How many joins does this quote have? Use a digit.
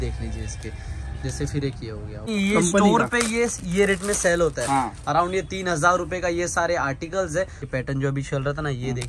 2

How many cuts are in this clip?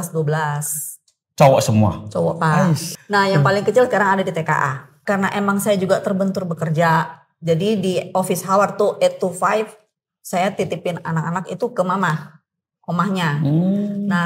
2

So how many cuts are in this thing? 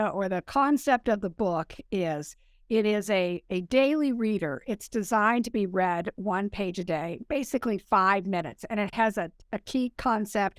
0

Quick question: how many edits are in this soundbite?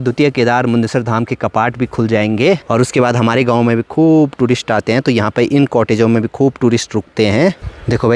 0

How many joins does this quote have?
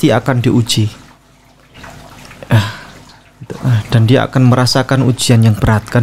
0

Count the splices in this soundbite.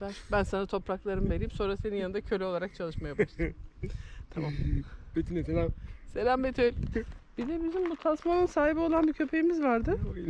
0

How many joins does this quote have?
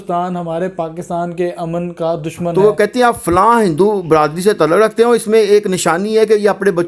1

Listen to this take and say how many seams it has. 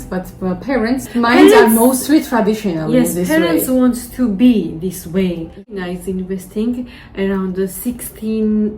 1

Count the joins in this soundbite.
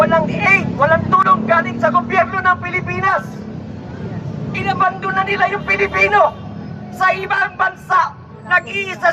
0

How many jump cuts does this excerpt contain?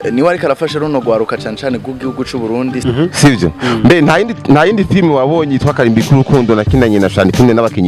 1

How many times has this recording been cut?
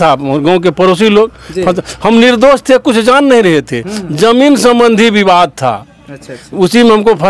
0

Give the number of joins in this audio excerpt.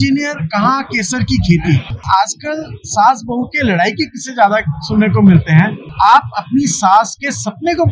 2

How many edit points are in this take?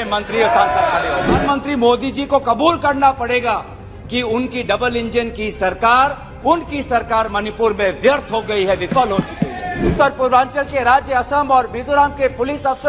2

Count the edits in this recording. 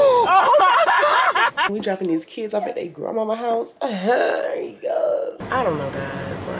2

